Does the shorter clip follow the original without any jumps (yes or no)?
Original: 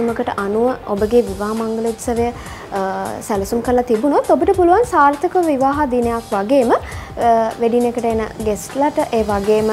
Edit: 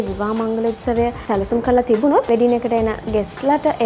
no